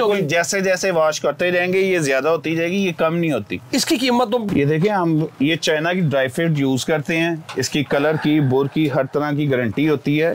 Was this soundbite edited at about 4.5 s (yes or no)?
yes